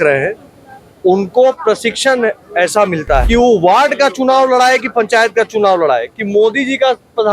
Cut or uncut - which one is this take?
cut